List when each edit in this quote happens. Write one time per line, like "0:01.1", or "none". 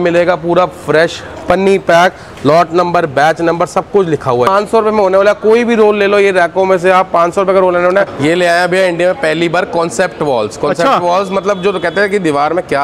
0:04.5
0:08.1